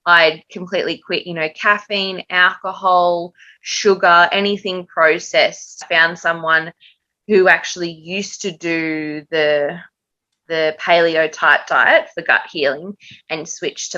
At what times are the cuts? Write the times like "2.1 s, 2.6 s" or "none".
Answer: 5.8 s